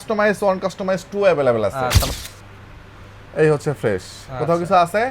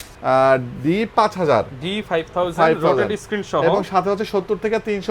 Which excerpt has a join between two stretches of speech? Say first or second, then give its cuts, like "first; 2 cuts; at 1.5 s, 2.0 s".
first; 1 cut; at 2.1 s